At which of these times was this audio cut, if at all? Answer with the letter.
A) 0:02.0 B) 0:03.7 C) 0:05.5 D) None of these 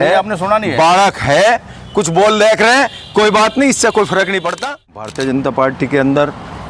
C